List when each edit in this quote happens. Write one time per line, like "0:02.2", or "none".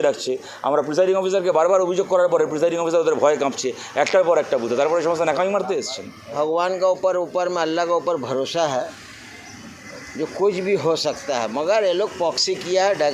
0:06.2